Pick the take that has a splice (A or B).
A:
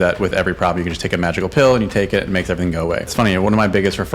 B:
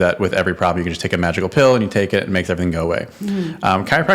A